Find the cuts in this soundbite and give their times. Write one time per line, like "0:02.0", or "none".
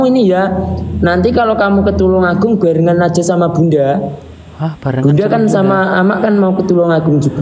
none